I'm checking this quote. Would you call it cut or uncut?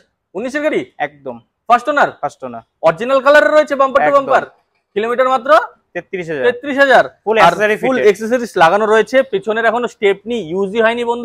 uncut